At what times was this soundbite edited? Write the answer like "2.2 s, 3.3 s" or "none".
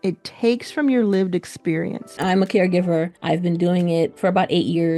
2.2 s, 3.1 s, 4.1 s

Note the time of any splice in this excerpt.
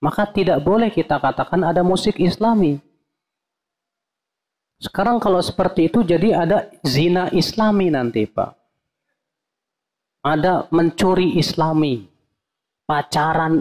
none

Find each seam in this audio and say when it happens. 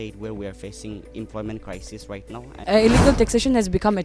2.6 s

